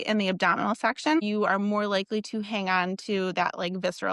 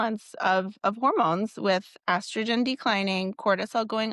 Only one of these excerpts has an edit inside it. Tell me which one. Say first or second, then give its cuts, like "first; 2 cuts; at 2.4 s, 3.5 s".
first; 1 cut; at 1.2 s